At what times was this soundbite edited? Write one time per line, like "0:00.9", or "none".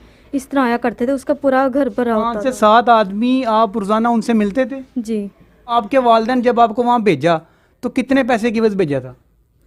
0:05.7